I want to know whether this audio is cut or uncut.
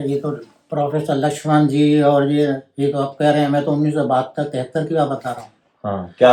uncut